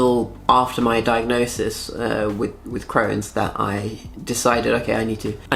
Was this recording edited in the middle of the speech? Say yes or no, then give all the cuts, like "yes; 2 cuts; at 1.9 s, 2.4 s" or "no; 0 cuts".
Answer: no; 0 cuts